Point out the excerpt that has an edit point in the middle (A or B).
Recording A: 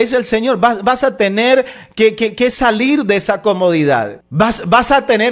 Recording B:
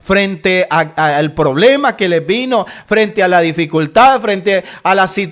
A